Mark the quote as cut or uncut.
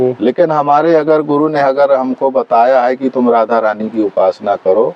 uncut